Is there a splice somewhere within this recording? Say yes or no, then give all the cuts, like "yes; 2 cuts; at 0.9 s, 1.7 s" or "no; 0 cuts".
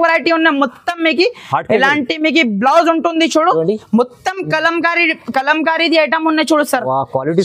no; 0 cuts